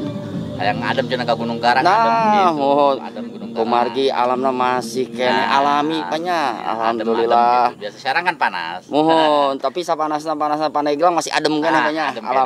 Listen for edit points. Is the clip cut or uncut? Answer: uncut